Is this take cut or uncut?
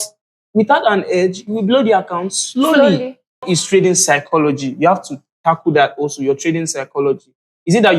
cut